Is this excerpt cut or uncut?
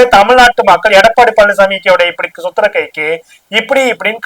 uncut